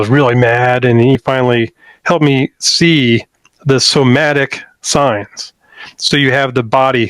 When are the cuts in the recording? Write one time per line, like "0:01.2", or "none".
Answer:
0:01.2